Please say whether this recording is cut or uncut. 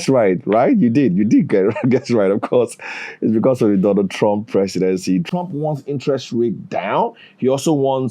cut